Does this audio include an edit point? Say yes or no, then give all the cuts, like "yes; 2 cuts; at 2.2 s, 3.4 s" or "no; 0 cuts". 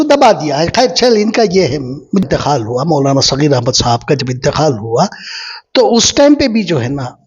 yes; 1 cut; at 2.2 s